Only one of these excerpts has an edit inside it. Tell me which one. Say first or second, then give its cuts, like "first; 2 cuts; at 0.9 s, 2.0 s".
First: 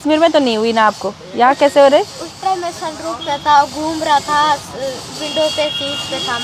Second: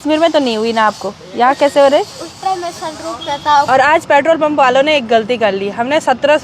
second; 1 cut; at 3.7 s